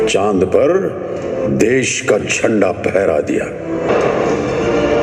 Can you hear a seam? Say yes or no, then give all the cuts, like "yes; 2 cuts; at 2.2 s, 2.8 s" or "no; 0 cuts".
yes; 1 cut; at 3.9 s